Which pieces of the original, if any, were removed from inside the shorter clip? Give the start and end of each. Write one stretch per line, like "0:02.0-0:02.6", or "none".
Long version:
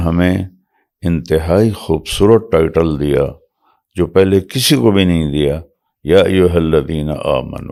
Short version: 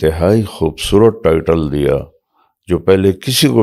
none